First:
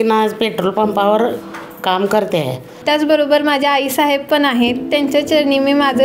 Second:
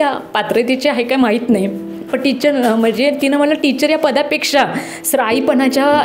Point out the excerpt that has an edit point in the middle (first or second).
first